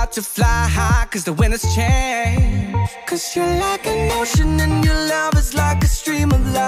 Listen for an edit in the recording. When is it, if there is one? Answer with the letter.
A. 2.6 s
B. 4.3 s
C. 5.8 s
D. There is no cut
A